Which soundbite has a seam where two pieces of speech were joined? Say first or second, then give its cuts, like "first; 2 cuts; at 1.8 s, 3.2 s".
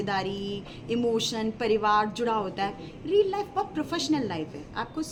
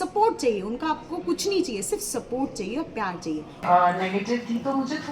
second; 1 cut; at 3.6 s